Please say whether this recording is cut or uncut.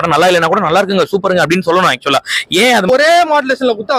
cut